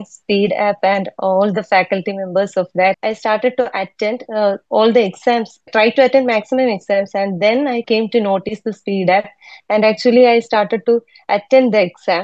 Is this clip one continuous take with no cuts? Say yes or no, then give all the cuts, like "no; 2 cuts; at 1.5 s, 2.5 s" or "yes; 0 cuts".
no; 1 cut; at 3.0 s